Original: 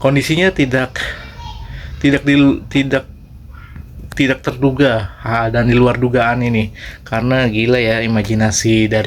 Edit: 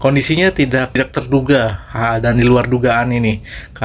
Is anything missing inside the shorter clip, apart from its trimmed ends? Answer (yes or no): yes